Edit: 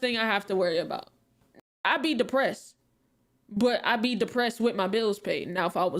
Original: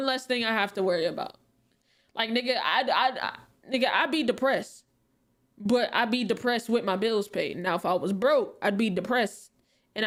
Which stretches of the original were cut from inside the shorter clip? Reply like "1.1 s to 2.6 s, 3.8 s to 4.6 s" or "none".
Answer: 2.1 s to 3.9 s